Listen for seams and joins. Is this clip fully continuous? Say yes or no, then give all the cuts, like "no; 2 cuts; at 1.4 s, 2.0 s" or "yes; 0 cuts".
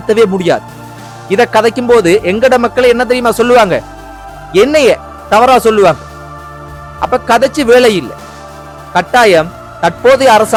yes; 0 cuts